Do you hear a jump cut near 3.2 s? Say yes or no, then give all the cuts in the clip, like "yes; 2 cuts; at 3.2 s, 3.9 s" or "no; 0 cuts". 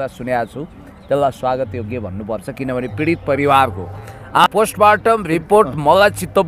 no; 1 cut; at 4.4 s